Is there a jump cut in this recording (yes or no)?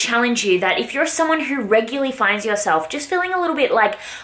no